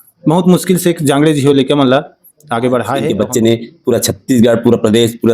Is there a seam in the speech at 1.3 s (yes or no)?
no